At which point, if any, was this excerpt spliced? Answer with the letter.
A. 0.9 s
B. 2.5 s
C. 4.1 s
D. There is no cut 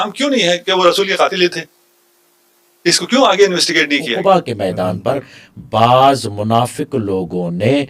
C